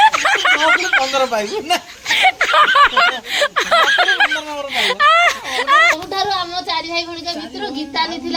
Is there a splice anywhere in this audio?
yes; 1 cut; at 6.0 s

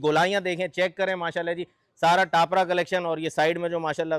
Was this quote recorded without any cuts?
yes; 0 cuts

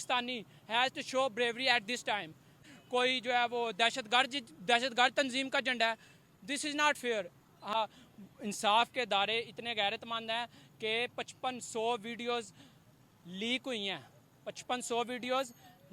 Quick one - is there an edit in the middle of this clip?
yes; 2 cuts; at 2.7 s, 7.7 s

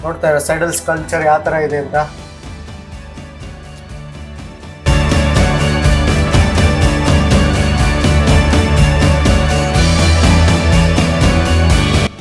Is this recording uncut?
yes; 0 cuts

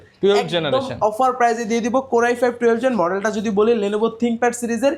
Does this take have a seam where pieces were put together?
no; 0 cuts

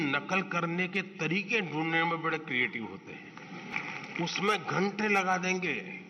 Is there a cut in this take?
yes; 1 cut; at 3.7 s

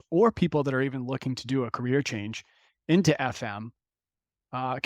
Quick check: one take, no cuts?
yes; 0 cuts

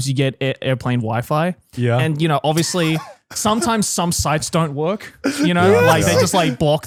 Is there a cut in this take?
no; 0 cuts

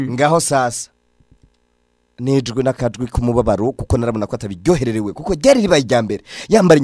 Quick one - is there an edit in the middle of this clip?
no; 0 cuts

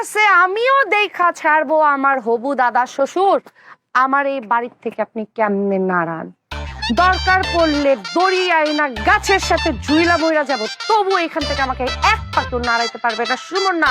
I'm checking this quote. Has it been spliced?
no; 0 cuts

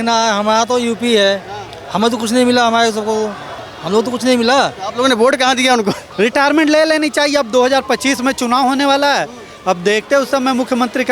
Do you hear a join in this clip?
yes; 1 cut; at 6.0 s

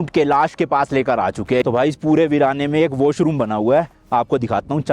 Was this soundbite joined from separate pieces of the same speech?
yes; 1 cut; at 1.6 s

